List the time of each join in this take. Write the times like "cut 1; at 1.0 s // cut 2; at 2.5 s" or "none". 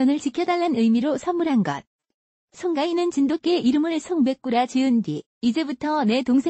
none